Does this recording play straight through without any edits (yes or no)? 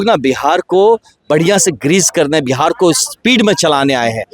no